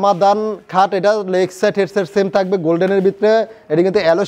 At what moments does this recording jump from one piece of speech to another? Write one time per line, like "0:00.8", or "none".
none